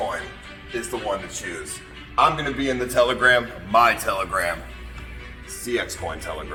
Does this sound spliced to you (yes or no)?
no